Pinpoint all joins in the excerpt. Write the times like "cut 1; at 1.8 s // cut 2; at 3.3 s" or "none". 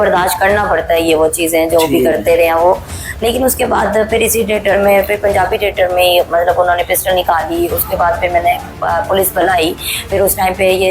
none